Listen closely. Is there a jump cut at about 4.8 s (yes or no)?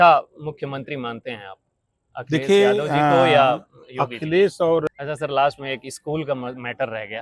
yes